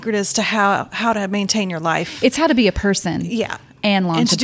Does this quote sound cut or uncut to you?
uncut